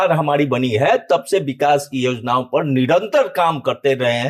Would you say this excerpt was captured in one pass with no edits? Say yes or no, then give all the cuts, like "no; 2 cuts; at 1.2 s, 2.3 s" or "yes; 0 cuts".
yes; 0 cuts